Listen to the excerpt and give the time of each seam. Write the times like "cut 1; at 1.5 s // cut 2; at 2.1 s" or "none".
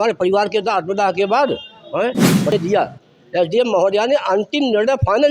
cut 1; at 2.5 s